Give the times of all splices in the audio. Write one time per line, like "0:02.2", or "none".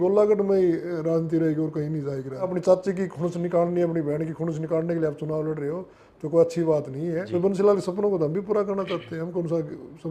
0:02.5
0:07.2